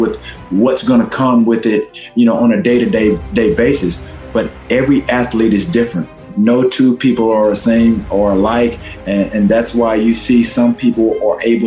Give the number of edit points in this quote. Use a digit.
1